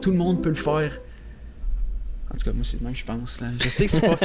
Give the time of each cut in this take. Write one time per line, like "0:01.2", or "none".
none

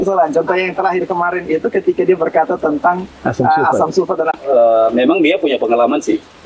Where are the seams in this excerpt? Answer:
0:04.4

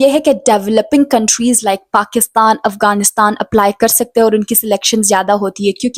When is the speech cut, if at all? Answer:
none

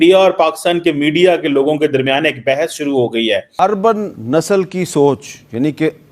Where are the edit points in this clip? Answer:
0:03.5

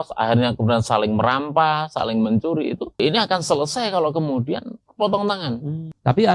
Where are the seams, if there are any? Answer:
0:03.0

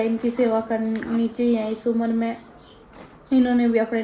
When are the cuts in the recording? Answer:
none

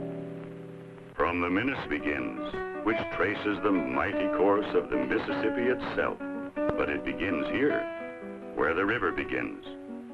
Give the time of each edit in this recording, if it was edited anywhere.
none

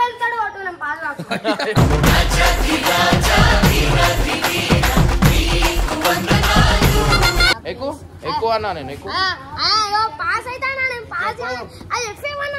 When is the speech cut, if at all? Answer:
0:07.4

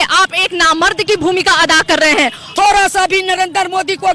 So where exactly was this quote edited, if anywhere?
0:02.4

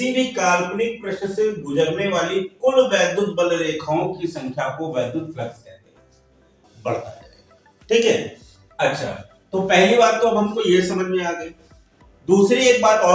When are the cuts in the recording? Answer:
0:06.6

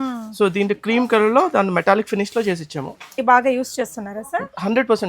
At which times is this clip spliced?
0:03.1

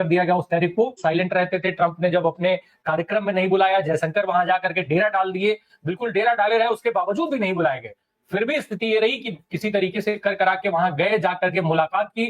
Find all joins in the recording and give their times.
0:01.0

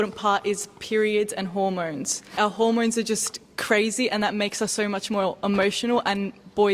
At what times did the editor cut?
0:02.3

